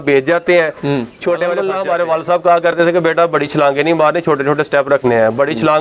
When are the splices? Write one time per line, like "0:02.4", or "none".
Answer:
0:01.8